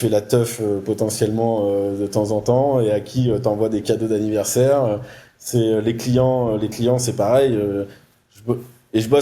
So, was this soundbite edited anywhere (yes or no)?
no